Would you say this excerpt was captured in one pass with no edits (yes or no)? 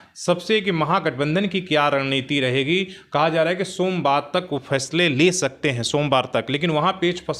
yes